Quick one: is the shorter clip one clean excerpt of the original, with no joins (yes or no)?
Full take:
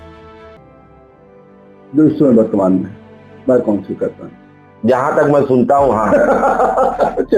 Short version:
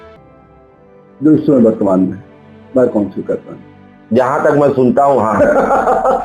no